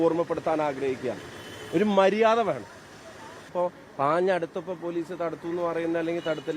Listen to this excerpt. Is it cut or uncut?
cut